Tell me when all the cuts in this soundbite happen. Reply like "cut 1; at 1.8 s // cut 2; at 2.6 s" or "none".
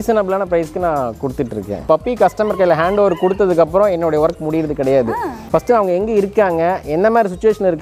cut 1; at 1.8 s // cut 2; at 5.4 s